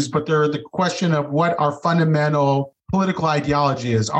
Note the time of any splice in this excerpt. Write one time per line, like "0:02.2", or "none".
0:02.8